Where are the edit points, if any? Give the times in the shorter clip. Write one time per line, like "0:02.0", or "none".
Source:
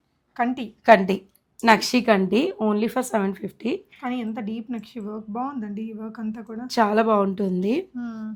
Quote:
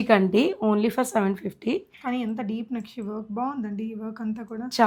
none